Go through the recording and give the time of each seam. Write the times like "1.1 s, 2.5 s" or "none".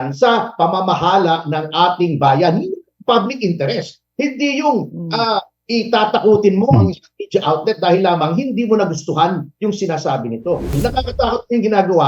10.8 s